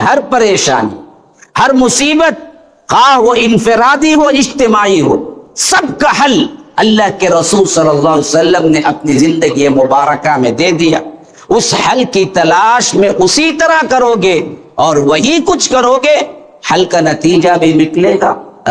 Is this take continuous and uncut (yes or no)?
yes